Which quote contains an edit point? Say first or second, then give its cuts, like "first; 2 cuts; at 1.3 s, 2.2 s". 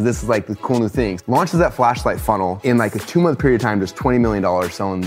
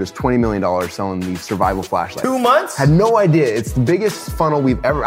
first; 2 cuts; at 1.2 s, 2.6 s